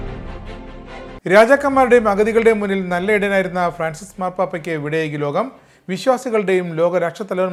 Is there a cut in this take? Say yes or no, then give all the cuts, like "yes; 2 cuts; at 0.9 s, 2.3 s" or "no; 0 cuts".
no; 0 cuts